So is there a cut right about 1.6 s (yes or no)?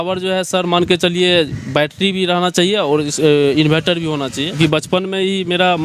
no